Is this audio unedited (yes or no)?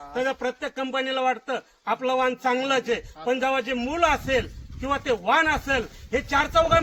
yes